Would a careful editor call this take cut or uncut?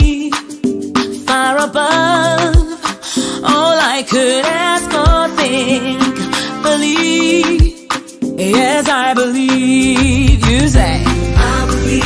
uncut